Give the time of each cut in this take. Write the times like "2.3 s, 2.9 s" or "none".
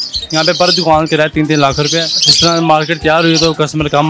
2.2 s